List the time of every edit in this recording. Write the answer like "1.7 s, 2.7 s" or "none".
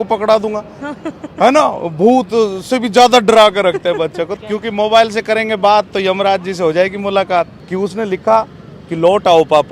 4.3 s, 7.5 s